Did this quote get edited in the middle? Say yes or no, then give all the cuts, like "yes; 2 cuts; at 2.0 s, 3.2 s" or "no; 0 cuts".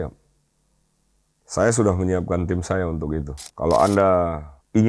yes; 1 cut; at 3.4 s